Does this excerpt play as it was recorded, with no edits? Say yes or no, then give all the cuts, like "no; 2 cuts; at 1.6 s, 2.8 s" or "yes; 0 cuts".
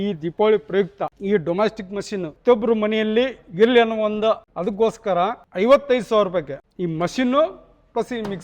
no; 3 cuts; at 1.2 s, 2.3 s, 4.5 s